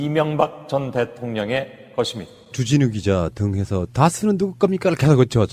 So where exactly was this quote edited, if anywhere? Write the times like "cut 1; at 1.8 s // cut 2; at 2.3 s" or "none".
cut 1; at 2.2 s